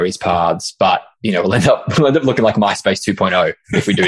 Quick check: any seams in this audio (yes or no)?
no